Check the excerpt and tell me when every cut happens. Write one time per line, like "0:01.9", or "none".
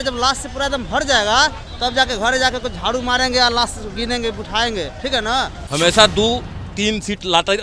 0:05.6